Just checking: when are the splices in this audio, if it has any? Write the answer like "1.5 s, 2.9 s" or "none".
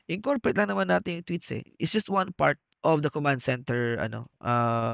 2.7 s